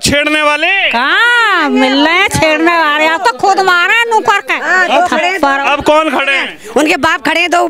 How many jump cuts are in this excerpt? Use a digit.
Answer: 0